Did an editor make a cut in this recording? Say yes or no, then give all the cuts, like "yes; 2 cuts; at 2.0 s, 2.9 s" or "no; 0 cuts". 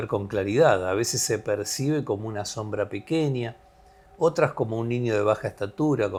no; 0 cuts